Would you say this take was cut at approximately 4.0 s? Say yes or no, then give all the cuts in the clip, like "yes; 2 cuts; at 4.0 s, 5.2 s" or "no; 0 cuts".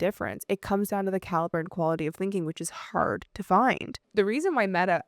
yes; 1 cut; at 4.0 s